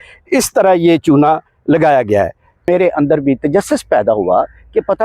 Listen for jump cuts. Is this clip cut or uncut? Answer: cut